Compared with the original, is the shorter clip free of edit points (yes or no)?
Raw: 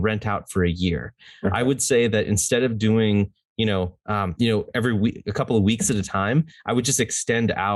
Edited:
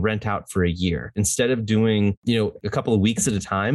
no